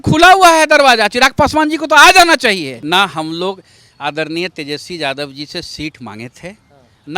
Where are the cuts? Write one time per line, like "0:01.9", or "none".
0:02.7